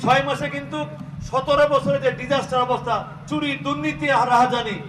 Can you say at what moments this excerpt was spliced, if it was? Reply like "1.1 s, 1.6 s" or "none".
none